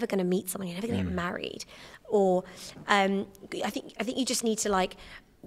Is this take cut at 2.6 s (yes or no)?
no